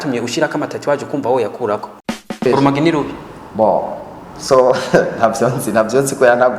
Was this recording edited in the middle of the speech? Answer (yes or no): yes